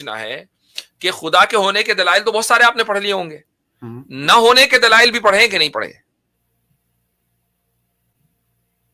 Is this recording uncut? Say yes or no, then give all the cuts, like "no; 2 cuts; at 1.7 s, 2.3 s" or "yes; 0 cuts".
yes; 0 cuts